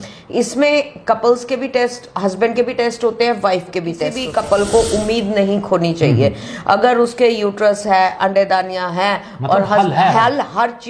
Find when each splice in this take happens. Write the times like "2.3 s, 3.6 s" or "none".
4.1 s